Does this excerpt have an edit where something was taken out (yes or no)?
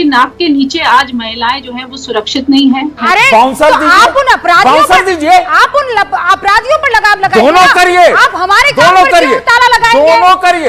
yes